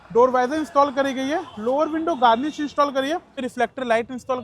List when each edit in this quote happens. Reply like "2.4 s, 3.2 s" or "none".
3.4 s